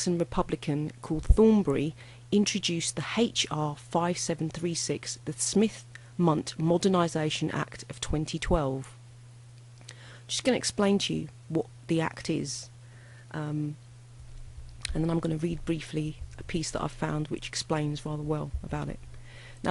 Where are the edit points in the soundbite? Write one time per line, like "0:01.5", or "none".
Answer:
0:07.1